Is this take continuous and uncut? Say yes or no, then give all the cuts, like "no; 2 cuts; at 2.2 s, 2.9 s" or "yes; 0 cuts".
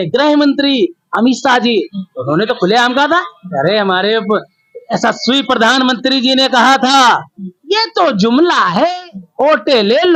yes; 0 cuts